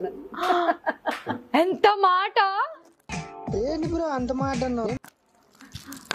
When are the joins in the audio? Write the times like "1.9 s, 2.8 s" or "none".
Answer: none